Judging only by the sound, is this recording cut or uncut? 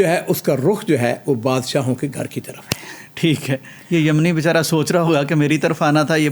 uncut